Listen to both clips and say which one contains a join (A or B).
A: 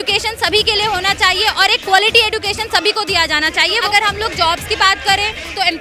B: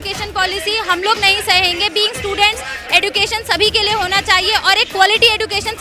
A